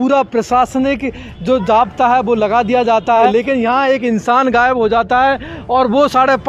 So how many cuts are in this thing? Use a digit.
1